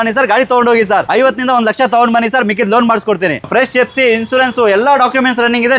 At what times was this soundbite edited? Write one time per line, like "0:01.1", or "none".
0:01.1
0:03.5